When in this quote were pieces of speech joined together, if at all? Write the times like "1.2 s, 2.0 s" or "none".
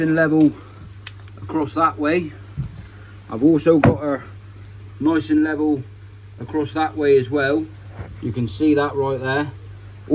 none